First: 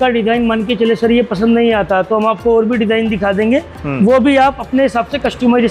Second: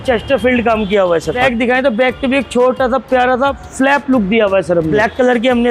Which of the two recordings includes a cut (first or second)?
second